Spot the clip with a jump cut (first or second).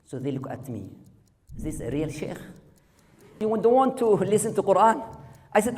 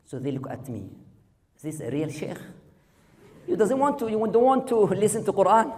first